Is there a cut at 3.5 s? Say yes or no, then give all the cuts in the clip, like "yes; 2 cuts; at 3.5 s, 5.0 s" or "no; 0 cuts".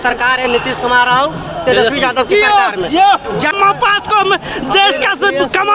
yes; 1 cut; at 3.5 s